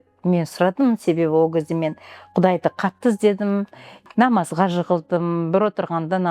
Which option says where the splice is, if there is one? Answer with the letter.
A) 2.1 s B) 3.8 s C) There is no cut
B